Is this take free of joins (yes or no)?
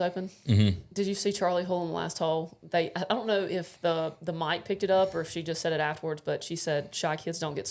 yes